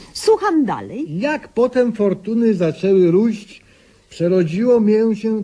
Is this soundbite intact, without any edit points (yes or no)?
no